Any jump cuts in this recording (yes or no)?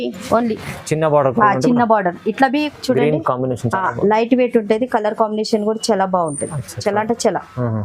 yes